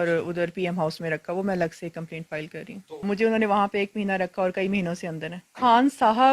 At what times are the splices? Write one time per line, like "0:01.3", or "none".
0:03.1
0:05.5

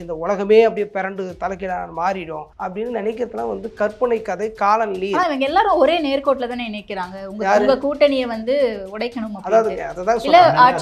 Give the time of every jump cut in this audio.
0:02.4

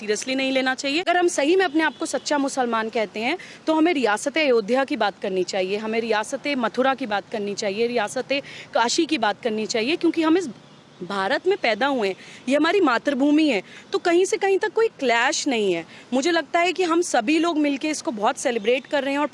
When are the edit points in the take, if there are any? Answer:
0:01.0

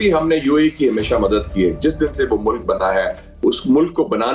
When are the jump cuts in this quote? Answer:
none

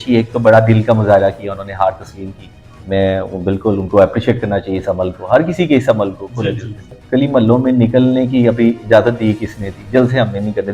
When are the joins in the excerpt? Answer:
0:06.9

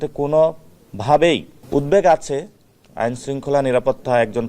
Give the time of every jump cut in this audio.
0:01.5

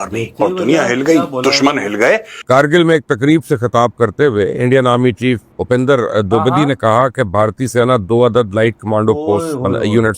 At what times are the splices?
0:02.3

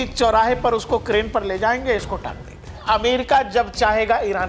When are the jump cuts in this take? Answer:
0:02.8

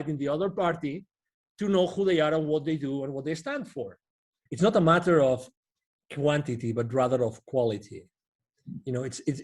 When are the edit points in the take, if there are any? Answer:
0:04.4

